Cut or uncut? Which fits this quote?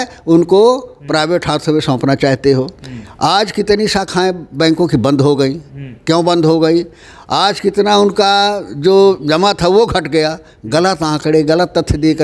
uncut